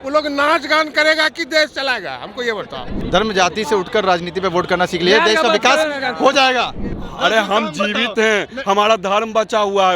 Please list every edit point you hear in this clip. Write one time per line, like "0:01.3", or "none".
0:03.0
0:06.8